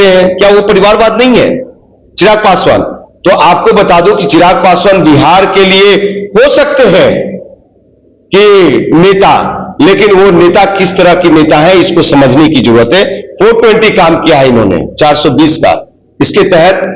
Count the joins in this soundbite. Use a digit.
0